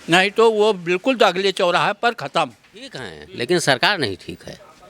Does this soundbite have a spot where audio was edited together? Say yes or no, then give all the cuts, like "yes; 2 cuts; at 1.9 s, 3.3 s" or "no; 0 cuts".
yes; 1 cut; at 3.2 s